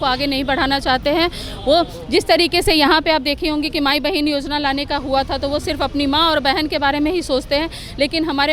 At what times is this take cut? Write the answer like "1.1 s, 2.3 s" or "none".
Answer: none